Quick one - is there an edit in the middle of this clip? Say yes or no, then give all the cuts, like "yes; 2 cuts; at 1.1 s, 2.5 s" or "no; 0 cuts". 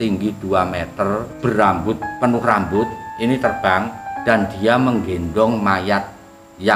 yes; 4 cuts; at 1.3 s, 2.1 s, 3.0 s, 4.0 s